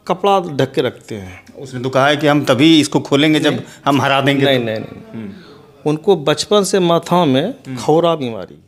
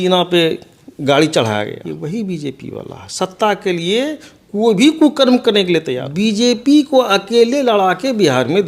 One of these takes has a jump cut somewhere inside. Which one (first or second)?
second